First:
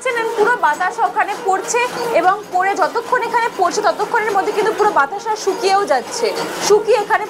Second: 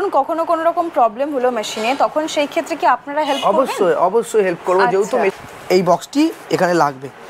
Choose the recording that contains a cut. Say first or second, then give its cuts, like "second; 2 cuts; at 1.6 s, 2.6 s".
second; 1 cut; at 5.4 s